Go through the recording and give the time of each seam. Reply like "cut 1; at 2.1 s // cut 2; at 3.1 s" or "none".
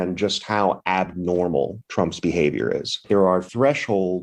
cut 1; at 3.0 s